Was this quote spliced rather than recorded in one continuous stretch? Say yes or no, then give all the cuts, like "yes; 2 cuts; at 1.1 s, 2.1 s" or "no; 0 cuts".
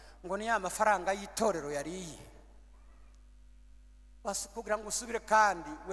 no; 0 cuts